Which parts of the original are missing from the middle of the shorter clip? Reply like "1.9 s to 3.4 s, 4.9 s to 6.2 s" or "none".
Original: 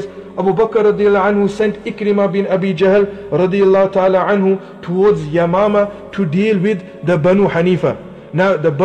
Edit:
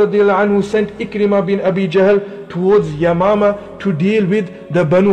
3.2 s to 4.7 s

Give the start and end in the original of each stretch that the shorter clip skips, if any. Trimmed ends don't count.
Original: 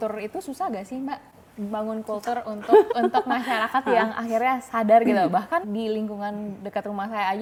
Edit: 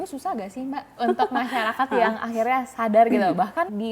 1.4 s to 3.0 s

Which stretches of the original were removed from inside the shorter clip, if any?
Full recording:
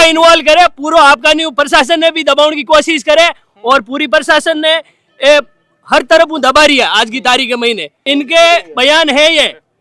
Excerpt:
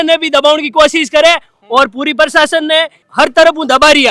4.9 s to 5.7 s

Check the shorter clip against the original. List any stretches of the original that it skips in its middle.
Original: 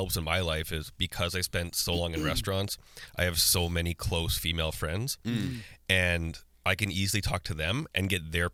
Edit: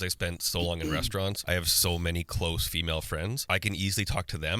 2.7 s to 3.1 s, 5.1 s to 6.5 s

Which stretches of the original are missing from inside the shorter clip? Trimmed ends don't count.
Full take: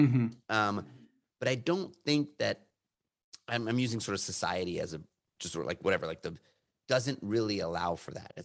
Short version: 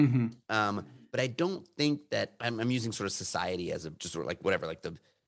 0.9 s to 1.2 s, 2.6 s to 3.4 s, 5.1 s to 5.4 s

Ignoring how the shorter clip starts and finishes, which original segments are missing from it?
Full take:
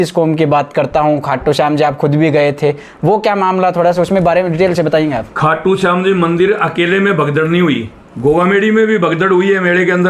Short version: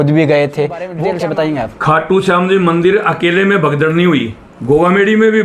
3.1 s to 4.6 s

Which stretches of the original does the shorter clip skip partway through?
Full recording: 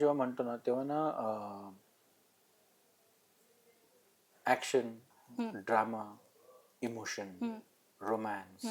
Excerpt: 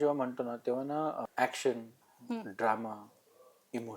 1.2 s to 4.3 s

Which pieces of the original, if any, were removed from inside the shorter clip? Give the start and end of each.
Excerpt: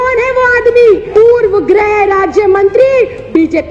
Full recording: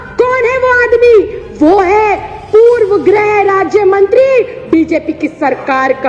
1.3 s to 2.4 s

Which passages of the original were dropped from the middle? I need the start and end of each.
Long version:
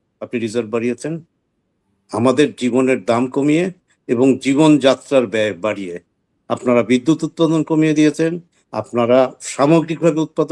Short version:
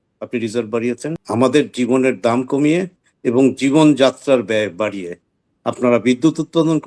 1.2 s to 2.0 s

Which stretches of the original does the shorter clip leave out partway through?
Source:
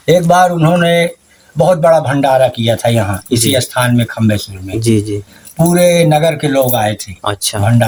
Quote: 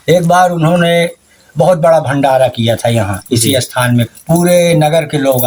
4.1 s to 5.4 s

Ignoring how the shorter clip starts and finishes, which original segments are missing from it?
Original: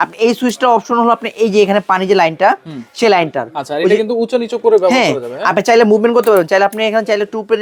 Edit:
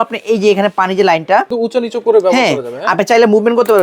2.6 s to 4.1 s

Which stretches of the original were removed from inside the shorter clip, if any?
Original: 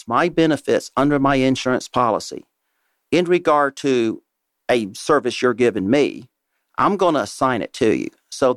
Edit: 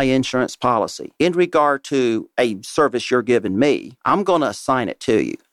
2.3 s to 2.9 s, 4.2 s to 4.6 s, 6.2 s to 6.7 s

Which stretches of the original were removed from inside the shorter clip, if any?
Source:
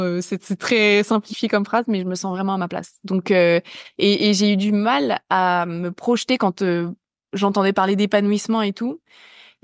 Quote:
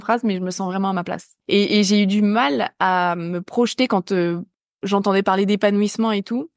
2.9 s to 3.8 s

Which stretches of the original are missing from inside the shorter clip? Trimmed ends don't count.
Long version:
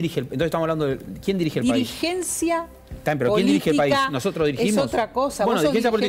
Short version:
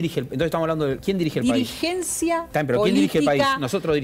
1.0 s to 1.2 s, 2.7 s to 3.0 s

